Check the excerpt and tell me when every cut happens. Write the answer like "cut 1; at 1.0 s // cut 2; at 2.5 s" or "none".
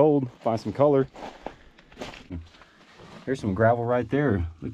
cut 1; at 2.4 s